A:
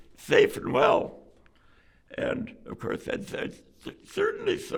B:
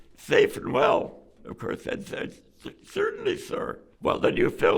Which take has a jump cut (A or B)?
B